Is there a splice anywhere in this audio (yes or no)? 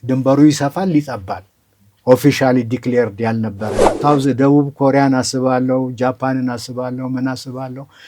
yes